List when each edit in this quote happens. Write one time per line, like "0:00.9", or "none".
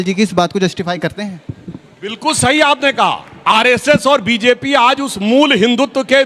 none